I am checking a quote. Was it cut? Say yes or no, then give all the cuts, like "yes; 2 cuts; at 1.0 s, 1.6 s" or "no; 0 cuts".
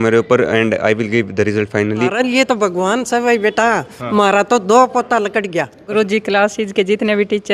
yes; 2 cuts; at 2.1 s, 5.9 s